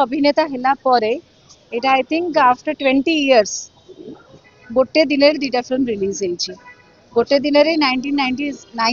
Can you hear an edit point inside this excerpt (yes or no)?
no